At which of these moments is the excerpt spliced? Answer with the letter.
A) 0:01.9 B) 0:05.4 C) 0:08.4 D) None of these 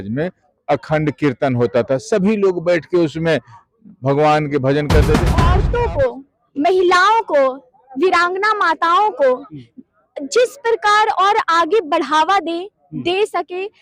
B